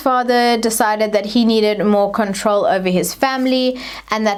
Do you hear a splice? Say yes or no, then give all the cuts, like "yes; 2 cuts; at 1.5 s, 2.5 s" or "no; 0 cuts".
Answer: no; 0 cuts